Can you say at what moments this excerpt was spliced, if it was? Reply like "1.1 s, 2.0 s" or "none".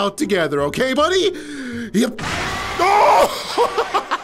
none